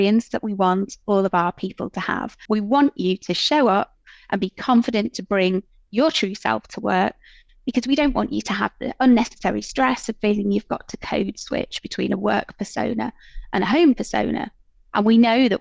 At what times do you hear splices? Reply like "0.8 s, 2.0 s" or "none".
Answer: 2.4 s

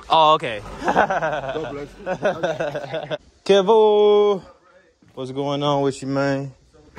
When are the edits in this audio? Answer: 3.2 s

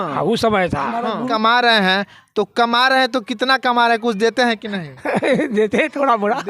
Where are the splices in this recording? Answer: 1.3 s

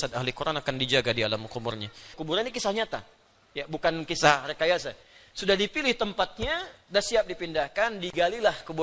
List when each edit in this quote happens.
2.1 s

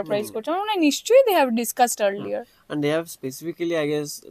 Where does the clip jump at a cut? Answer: none

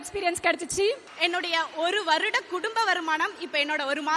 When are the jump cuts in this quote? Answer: 1.1 s

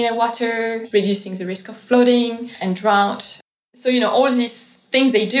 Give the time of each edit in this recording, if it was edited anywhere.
0.8 s, 2.5 s, 3.4 s

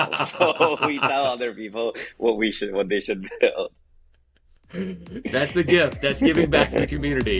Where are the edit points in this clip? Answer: none

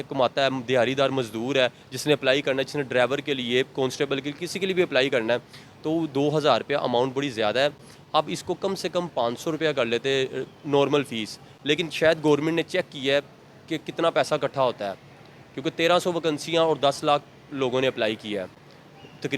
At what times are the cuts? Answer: none

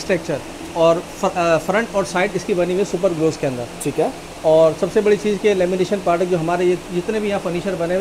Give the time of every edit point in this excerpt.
none

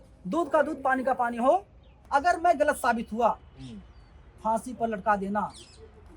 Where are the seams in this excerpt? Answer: 1.9 s

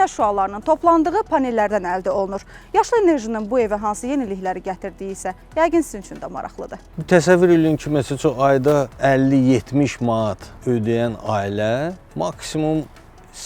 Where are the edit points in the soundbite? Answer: 6.9 s

